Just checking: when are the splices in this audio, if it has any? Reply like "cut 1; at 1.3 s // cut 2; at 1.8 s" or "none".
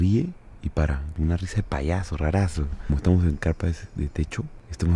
cut 1; at 1.1 s // cut 2; at 2.9 s